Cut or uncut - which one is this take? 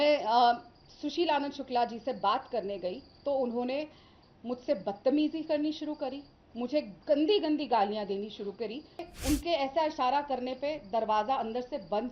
cut